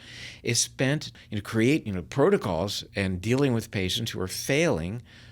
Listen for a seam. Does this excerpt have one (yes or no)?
yes